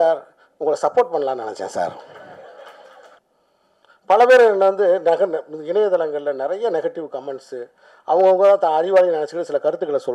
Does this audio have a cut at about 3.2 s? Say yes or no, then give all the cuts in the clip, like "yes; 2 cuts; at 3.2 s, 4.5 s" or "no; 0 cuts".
yes; 1 cut; at 3.2 s